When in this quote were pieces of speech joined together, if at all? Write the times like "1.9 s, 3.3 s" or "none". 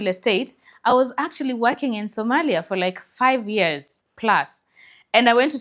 none